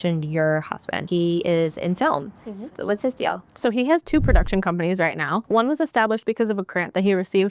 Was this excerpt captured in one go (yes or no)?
no